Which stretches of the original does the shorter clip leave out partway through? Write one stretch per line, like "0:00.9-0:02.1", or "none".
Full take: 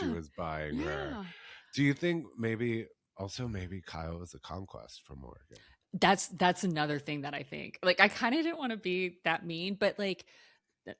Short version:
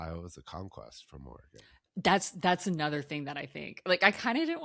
none